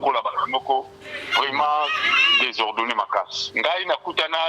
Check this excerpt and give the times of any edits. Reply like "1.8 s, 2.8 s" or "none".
3.4 s